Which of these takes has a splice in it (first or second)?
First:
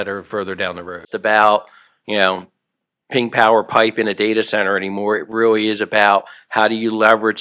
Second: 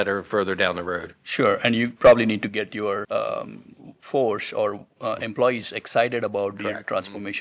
first